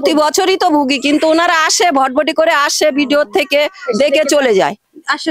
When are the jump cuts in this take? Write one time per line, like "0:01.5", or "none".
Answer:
none